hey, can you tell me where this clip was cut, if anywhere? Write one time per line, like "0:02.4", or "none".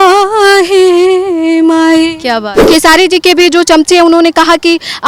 0:02.5